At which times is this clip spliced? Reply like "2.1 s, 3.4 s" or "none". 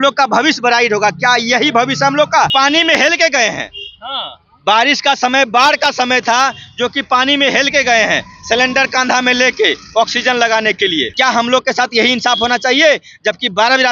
2.5 s, 11.1 s